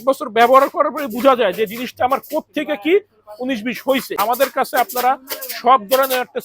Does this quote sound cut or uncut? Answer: cut